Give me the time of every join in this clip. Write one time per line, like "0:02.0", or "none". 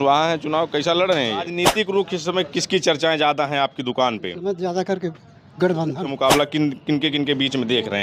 0:01.5
0:06.1